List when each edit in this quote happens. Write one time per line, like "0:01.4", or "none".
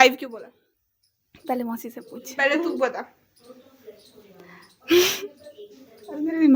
none